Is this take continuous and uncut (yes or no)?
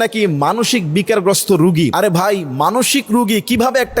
no